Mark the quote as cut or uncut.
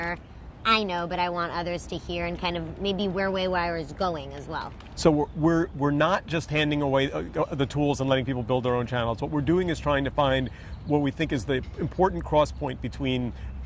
cut